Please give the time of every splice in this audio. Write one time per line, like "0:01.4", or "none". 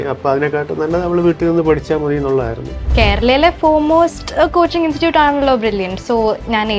0:02.8